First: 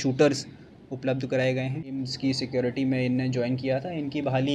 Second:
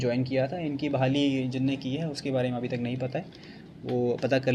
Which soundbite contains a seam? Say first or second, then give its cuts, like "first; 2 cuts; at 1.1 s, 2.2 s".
first; 1 cut; at 1.8 s